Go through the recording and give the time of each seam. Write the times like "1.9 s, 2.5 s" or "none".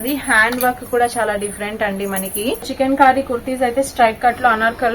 2.7 s